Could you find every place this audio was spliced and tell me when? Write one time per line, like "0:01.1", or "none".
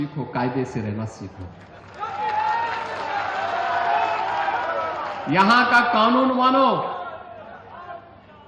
none